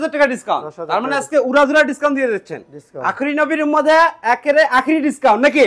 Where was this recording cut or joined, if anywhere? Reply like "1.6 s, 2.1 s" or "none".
none